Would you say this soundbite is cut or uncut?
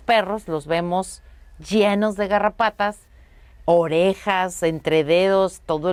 uncut